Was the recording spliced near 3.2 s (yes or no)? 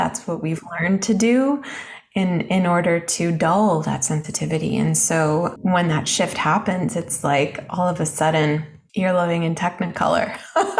no